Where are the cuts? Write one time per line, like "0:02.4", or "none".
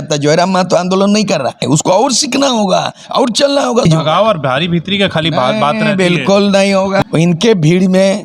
0:01.6
0:03.8
0:07.0